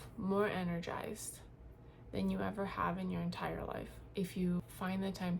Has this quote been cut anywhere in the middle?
yes; 2 cuts; at 4.0 s, 4.6 s

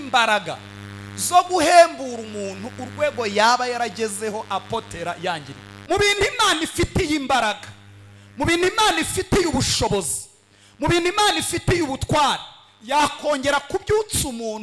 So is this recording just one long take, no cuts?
no; 1 cut; at 5.8 s

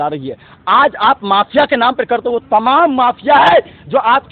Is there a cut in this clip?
no; 0 cuts

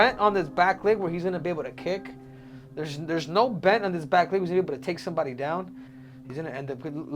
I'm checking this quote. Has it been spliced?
yes; 1 cut; at 5.8 s

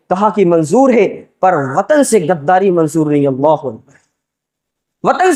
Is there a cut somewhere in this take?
no; 0 cuts

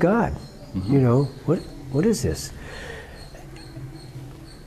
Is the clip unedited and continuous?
yes; 0 cuts

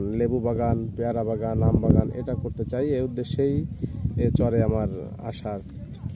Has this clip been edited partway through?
no; 0 cuts

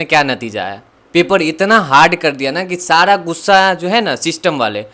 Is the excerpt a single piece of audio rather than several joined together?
yes; 0 cuts

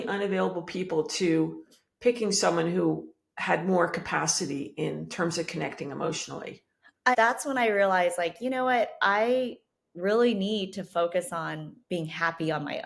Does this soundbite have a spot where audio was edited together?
yes; 1 cut; at 7.1 s

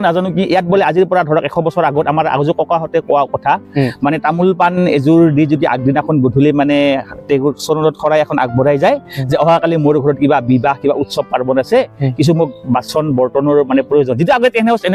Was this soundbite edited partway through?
no; 0 cuts

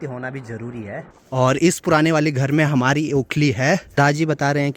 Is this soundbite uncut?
no; 2 cuts; at 1.0 s, 3.9 s

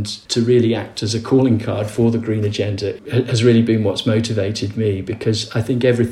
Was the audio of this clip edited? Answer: no; 0 cuts

